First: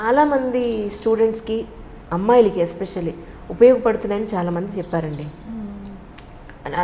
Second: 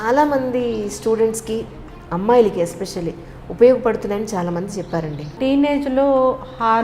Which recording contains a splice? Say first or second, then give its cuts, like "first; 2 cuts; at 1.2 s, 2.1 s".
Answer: second; 1 cut; at 5.4 s